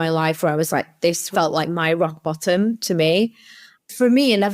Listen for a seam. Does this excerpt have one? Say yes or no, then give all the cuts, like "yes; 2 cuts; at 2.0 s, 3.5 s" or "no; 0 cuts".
yes; 2 cuts; at 1.3 s, 3.4 s